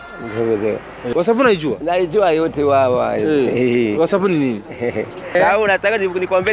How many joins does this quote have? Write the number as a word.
two